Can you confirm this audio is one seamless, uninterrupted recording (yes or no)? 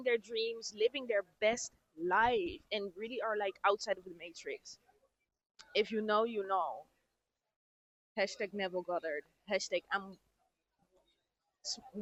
yes